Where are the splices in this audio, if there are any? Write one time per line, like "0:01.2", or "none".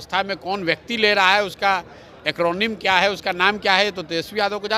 none